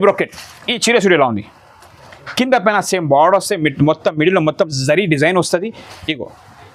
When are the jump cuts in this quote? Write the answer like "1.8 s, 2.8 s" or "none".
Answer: none